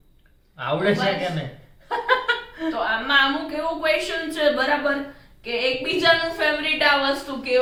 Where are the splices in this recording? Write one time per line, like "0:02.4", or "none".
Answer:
none